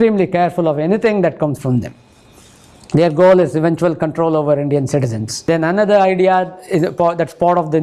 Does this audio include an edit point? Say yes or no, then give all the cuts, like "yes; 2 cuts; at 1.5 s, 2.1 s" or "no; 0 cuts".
yes; 1 cut; at 5.5 s